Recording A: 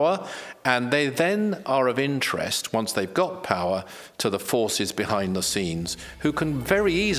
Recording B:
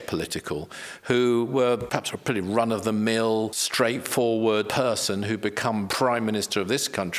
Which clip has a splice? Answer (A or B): B